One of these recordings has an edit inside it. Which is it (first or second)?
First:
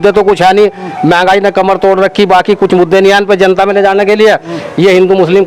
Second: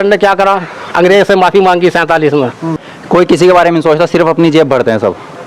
second